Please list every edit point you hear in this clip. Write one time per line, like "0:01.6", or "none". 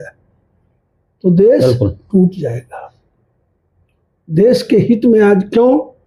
none